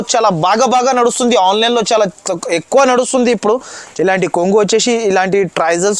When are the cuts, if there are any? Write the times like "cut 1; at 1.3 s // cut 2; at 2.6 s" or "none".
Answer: cut 1; at 3.8 s